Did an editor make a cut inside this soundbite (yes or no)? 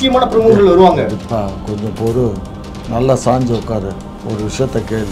yes